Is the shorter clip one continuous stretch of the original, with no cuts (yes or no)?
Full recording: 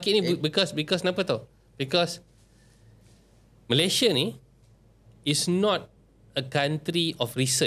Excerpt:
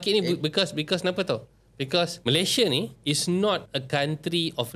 no